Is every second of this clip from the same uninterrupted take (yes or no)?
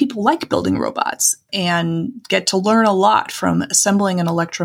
no